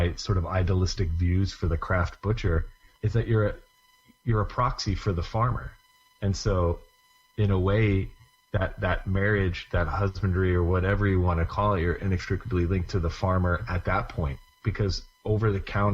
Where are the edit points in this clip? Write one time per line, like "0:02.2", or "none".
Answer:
0:02.8